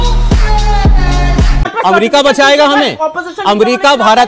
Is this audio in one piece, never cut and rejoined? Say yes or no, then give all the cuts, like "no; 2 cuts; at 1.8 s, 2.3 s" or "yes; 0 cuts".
yes; 0 cuts